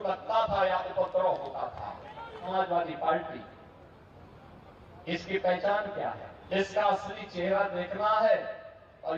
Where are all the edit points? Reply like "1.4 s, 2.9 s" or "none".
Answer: 2.5 s, 6.3 s

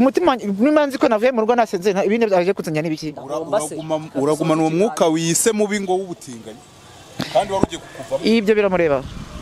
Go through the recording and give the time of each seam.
none

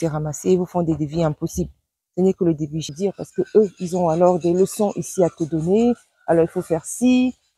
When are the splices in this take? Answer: 2.8 s

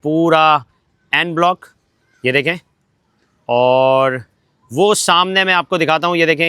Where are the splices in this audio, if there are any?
none

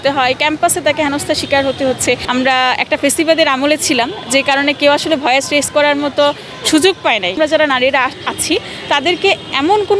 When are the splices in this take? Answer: 2.2 s, 7.4 s

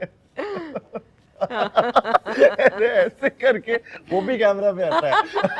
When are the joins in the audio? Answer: none

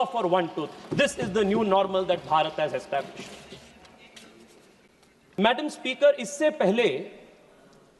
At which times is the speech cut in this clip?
none

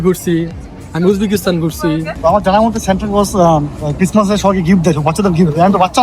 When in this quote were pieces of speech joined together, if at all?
2.1 s

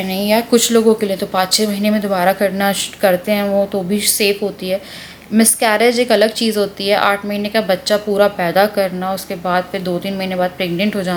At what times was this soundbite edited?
none

